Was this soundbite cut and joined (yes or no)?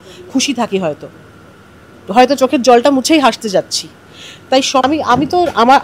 yes